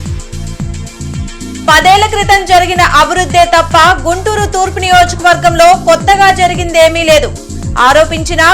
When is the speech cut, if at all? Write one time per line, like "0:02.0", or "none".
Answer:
0:01.3